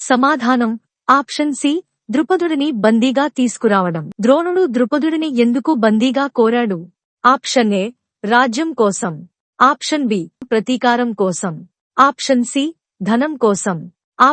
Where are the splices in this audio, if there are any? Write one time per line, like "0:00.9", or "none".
0:04.0